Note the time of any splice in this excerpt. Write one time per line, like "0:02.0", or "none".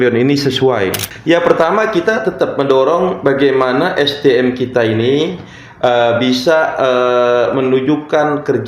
0:01.1